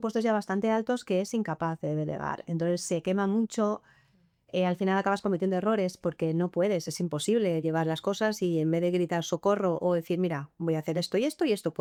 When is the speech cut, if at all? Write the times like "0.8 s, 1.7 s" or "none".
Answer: none